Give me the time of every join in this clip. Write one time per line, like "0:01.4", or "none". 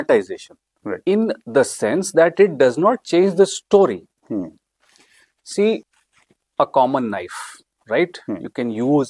none